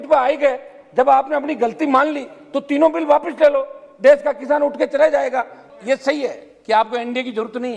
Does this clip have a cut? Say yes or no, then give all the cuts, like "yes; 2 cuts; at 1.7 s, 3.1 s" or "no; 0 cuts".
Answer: yes; 1 cut; at 5.7 s